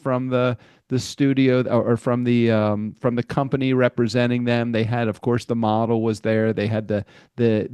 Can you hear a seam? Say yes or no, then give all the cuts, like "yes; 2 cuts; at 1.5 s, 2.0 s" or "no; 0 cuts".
no; 0 cuts